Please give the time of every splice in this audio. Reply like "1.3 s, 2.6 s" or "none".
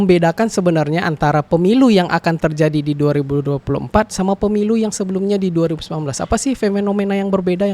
none